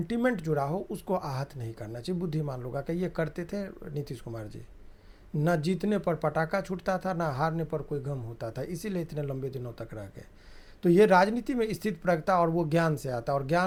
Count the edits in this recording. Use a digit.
0